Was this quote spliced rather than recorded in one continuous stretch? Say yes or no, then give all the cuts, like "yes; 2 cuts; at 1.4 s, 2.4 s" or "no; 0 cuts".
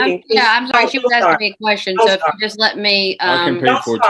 no; 0 cuts